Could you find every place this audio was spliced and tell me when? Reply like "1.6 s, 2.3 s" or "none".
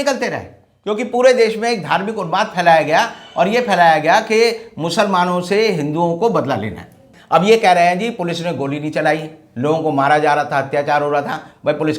7.1 s